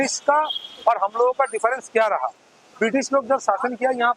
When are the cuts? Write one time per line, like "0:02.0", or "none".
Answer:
none